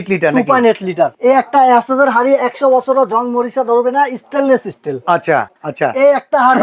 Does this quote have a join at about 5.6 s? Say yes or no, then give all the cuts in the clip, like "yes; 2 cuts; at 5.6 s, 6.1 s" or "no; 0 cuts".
yes; 2 cuts; at 1.1 s, 5.6 s